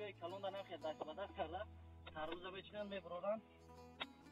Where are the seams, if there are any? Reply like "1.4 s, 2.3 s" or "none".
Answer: none